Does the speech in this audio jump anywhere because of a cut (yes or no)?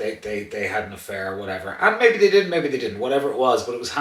no